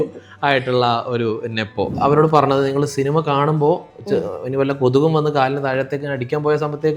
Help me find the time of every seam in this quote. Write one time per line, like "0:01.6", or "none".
0:01.9